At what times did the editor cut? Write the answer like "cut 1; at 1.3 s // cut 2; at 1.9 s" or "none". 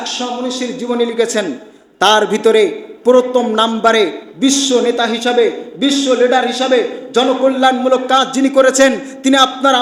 none